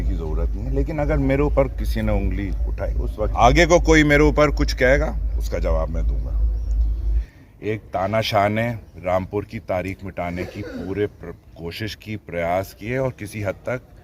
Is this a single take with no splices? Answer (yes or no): no